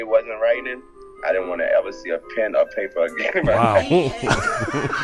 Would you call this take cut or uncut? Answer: uncut